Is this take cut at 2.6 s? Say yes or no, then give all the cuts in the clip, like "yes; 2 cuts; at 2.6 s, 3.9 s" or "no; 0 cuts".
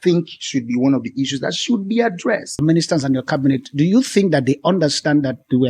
yes; 1 cut; at 2.6 s